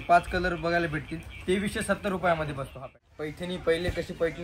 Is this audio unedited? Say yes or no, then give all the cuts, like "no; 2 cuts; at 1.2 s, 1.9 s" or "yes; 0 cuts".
no; 1 cut; at 2.9 s